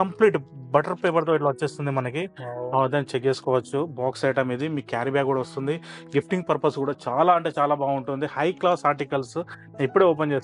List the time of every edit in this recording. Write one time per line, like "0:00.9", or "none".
none